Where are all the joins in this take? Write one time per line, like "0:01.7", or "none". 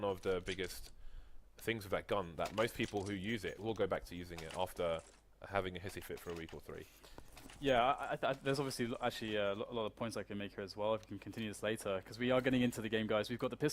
0:09.7